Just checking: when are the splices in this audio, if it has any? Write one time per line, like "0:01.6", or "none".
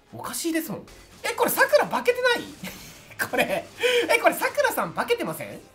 0:00.9